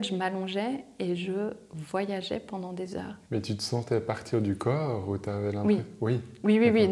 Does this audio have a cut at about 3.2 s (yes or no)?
yes